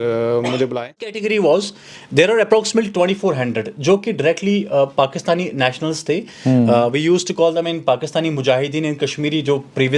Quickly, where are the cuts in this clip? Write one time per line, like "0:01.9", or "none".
0:01.2